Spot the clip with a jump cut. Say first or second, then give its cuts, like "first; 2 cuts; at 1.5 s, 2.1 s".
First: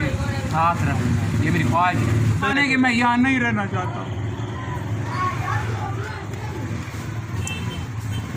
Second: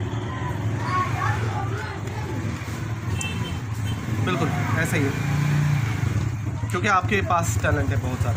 first; 1 cut; at 2.5 s